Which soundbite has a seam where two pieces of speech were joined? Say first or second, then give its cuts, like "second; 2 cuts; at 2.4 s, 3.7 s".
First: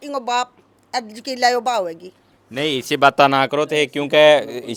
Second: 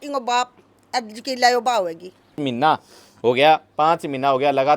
second; 1 cut; at 2.4 s